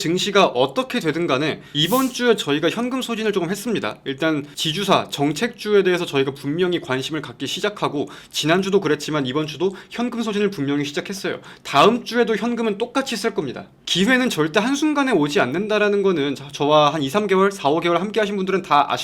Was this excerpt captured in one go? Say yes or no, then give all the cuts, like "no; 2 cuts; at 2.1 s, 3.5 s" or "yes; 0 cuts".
no; 1 cut; at 1.6 s